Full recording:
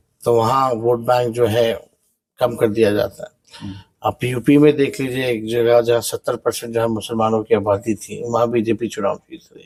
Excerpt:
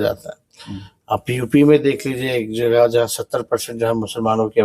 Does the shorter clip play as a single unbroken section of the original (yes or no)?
yes